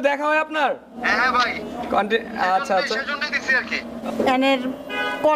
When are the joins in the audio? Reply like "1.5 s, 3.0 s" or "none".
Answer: 1.0 s, 3.9 s